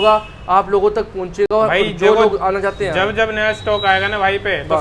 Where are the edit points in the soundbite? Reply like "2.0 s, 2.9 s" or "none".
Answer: none